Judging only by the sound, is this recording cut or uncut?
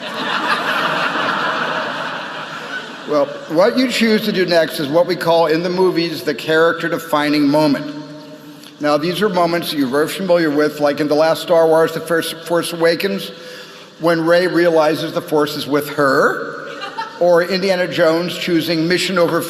cut